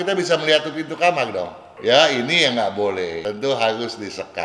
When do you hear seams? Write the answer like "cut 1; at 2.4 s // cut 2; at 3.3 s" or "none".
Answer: cut 1; at 1.7 s // cut 2; at 3.2 s